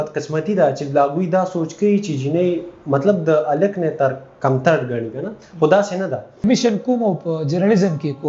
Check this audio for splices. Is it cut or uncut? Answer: cut